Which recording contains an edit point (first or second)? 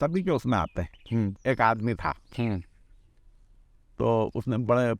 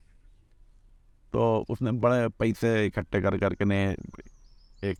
first